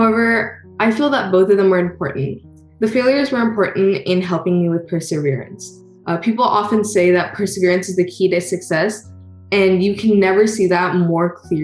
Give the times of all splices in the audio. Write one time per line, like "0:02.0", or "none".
none